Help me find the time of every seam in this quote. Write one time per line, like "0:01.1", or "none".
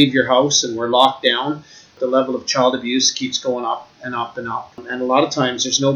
0:02.0
0:04.8